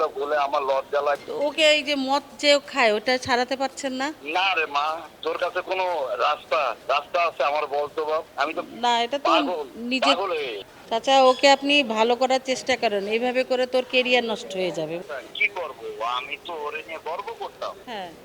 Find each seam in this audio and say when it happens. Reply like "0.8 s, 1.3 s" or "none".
1.2 s, 10.7 s, 15.1 s